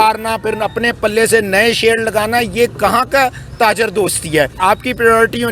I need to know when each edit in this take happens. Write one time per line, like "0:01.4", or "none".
0:04.5